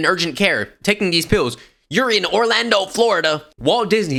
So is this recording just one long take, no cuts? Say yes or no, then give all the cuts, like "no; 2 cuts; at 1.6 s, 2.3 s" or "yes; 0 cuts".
yes; 0 cuts